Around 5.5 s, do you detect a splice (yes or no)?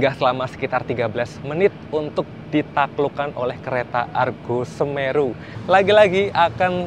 yes